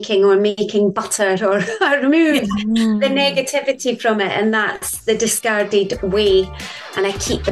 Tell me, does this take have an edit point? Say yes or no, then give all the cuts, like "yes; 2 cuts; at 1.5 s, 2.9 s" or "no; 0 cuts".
no; 0 cuts